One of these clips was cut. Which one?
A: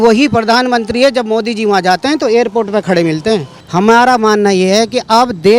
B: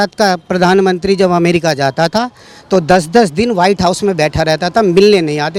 A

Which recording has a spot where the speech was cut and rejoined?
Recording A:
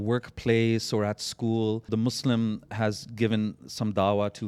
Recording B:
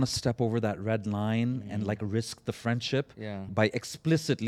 A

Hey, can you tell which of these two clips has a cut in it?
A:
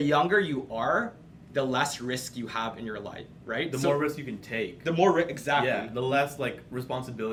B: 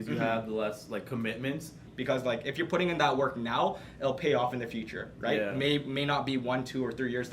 B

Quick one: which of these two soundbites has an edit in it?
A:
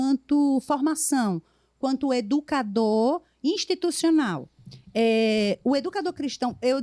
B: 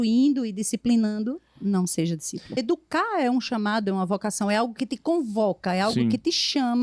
B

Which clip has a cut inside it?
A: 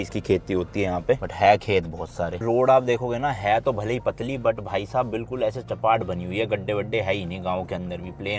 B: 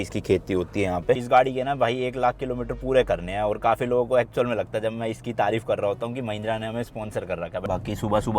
B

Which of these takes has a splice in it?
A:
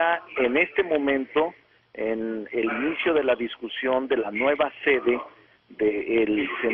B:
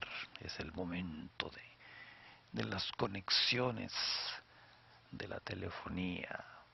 B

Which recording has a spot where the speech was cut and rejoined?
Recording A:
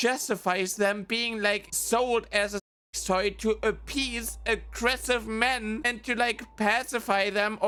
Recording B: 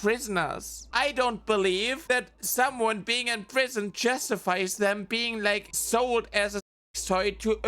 B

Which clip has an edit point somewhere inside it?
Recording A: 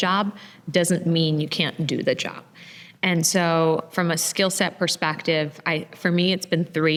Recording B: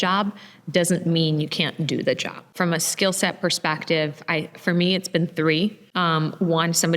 B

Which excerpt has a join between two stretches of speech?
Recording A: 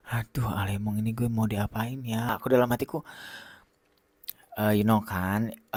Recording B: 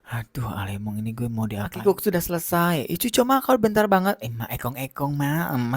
B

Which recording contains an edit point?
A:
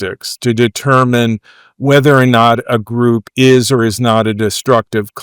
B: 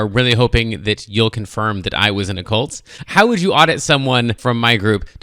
B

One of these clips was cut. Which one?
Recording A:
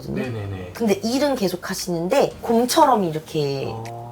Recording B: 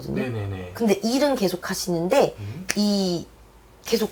A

